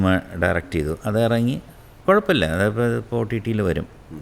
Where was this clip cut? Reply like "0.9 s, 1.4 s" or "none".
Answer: none